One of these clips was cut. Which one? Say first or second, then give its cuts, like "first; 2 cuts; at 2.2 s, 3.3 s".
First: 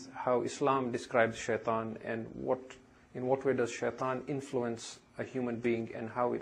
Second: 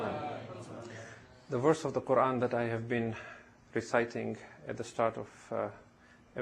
second; 1 cut; at 1.1 s